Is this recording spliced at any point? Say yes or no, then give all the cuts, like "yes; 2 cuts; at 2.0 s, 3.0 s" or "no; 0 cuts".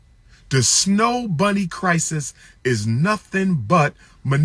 no; 0 cuts